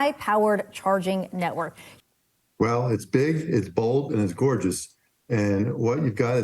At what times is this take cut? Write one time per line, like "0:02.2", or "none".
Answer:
0:01.8